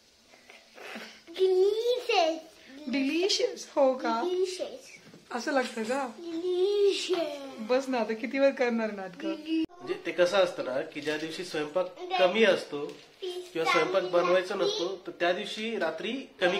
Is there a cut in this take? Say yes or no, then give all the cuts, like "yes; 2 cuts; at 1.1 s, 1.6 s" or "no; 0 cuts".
yes; 1 cut; at 9.7 s